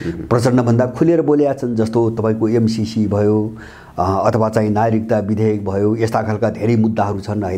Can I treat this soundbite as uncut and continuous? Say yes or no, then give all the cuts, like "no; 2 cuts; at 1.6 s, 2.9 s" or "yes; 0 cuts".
yes; 0 cuts